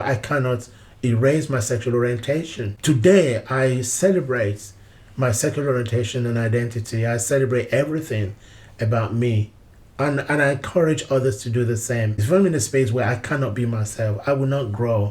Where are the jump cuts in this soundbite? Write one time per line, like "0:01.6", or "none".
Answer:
0:12.1